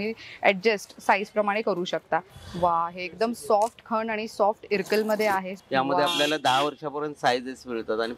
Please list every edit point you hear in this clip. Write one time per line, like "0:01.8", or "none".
0:02.4
0:05.5